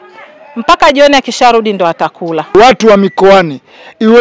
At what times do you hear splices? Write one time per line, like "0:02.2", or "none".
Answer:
0:02.5